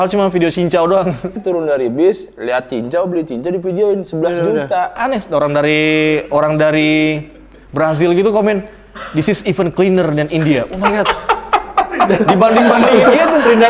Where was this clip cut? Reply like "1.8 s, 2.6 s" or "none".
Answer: 1.4 s, 5.0 s